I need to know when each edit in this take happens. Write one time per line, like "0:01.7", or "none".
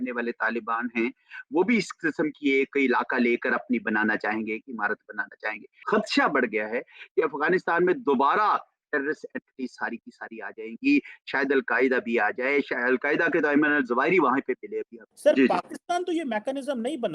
none